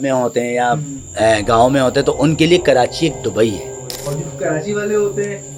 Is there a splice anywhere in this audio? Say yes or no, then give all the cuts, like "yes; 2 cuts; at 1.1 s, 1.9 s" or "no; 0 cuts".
yes; 1 cut; at 4.1 s